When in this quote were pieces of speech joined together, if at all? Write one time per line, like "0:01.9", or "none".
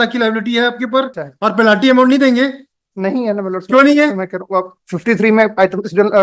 0:01.2